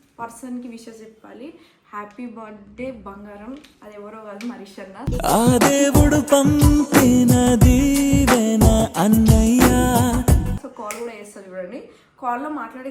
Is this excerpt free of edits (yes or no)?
yes